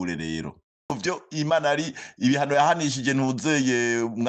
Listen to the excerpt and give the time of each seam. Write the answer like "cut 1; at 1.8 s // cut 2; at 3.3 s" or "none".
cut 1; at 1.0 s